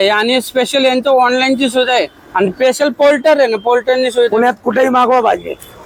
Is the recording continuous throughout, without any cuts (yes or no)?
yes